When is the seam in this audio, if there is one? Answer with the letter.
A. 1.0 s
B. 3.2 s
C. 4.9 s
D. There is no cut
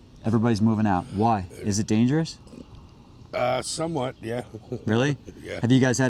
D